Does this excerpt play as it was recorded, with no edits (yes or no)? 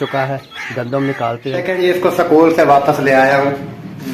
no